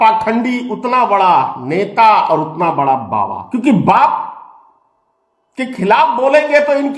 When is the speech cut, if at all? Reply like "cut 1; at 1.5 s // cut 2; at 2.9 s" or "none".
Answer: cut 1; at 3.4 s